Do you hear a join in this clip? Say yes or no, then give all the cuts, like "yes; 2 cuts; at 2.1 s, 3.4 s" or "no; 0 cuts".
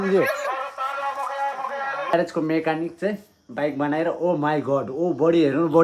yes; 1 cut; at 2.1 s